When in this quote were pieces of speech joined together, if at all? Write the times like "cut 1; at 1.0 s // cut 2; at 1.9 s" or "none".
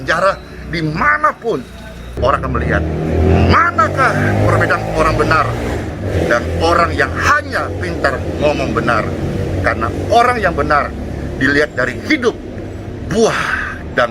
cut 1; at 2.1 s